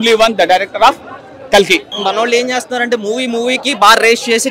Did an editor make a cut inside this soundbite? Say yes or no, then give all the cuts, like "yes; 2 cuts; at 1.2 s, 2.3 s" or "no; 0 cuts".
yes; 1 cut; at 1.9 s